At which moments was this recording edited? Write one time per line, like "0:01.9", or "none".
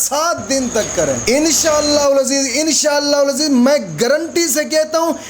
0:01.2